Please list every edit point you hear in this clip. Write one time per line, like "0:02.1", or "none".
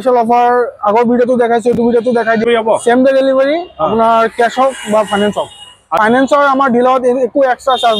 0:02.4
0:05.8

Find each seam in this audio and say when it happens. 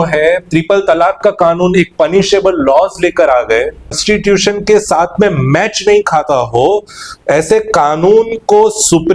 0:04.0

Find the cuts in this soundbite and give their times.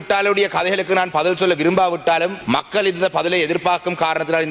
0:02.4

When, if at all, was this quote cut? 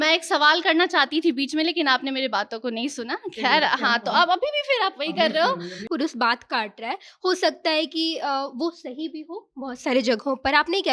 0:05.7

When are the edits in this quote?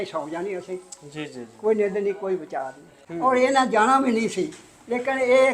0:02.9

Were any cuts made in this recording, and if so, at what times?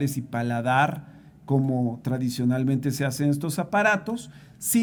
none

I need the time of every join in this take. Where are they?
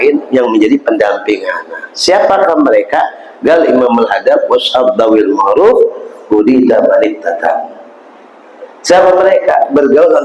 none

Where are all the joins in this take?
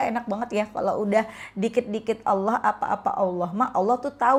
none

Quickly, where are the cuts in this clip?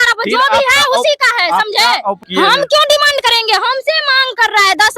0:02.2

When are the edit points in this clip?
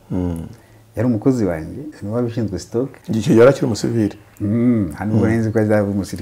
0:01.9
0:03.0

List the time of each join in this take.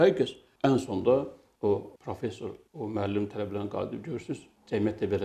none

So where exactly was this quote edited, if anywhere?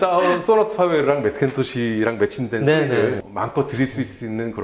0:03.3

